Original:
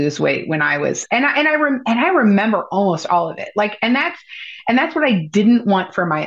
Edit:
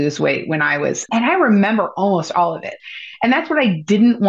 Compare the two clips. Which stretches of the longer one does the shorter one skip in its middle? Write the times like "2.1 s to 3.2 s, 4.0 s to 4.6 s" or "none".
1.1 s to 1.8 s, 3.4 s to 4.1 s